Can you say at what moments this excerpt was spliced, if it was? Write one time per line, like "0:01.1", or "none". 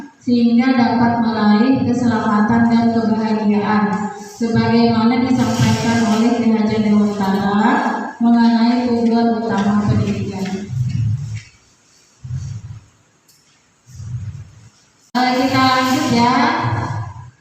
0:15.2